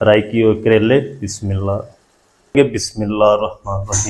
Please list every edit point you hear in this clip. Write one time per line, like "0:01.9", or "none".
0:02.5

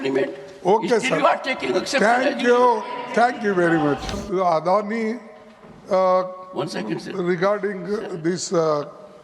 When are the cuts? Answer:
0:04.2

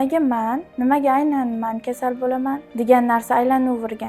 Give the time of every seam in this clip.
0:02.7

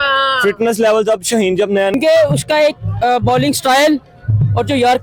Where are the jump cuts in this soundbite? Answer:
0:01.9

